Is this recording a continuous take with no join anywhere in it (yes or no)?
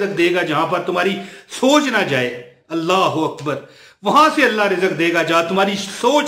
yes